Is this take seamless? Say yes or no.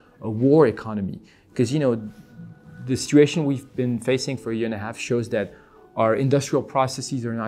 yes